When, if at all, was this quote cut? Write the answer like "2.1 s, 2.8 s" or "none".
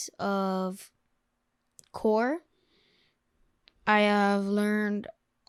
none